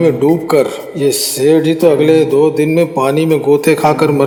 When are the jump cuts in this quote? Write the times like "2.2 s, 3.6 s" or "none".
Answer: none